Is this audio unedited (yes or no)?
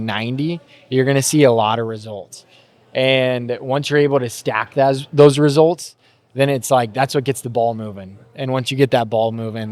yes